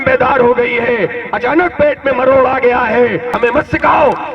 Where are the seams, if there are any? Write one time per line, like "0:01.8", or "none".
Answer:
0:03.3